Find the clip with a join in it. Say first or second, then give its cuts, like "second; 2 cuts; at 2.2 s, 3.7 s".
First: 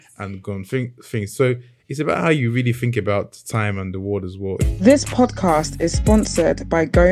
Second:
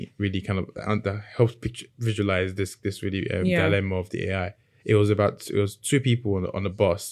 first; 1 cut; at 4.6 s